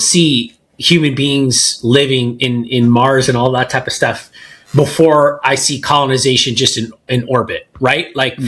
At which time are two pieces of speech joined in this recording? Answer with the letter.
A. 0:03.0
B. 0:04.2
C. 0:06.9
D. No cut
D